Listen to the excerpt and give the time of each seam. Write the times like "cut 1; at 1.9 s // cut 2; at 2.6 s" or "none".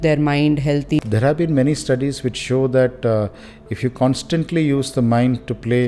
cut 1; at 1.0 s